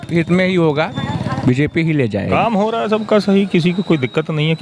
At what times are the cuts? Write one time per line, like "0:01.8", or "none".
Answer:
0:01.0
0:02.3

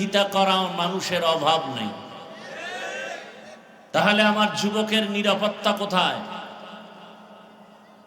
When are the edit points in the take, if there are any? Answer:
0:03.7

